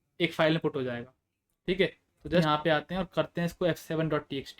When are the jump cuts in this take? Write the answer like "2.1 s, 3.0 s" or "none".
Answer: 2.4 s